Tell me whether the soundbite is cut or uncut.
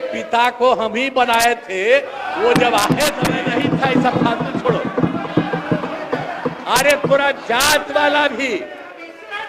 cut